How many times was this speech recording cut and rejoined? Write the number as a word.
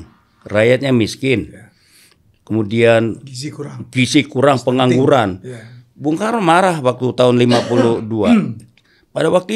zero